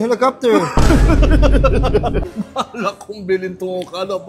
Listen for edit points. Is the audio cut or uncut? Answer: cut